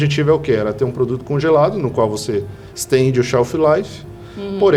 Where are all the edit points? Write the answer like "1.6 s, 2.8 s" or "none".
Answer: none